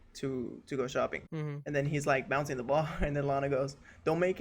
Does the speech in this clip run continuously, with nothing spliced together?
no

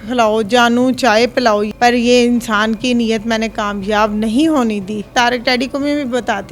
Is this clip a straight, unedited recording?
no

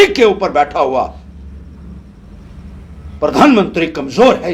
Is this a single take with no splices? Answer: yes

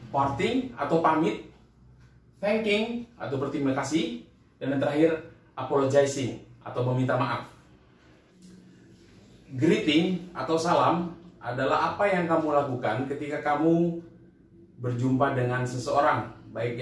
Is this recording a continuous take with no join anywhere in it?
no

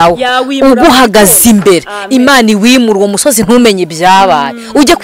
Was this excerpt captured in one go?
yes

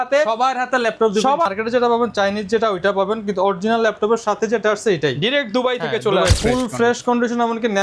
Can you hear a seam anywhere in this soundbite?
yes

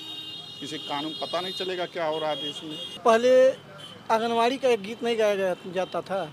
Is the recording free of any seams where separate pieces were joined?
no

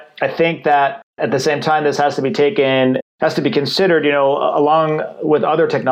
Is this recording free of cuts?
no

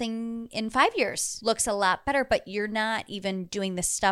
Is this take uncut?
no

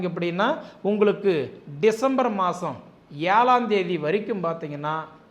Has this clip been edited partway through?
no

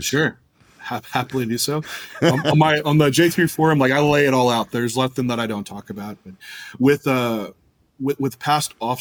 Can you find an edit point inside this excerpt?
no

